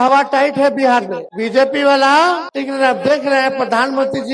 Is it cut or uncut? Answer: cut